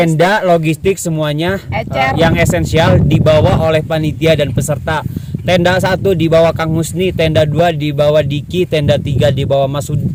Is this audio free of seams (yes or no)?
yes